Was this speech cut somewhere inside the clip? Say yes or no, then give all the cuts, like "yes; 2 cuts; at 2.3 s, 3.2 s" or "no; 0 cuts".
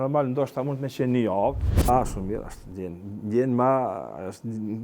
yes; 1 cut; at 1.9 s